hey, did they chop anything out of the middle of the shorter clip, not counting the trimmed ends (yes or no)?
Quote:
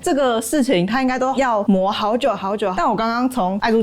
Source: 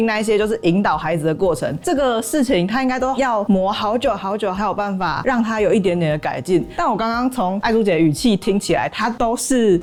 yes